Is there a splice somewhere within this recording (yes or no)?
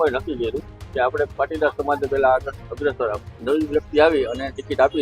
yes